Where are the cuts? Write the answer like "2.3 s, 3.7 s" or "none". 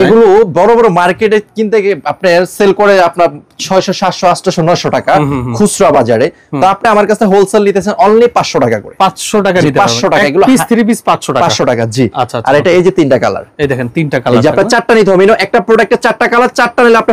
none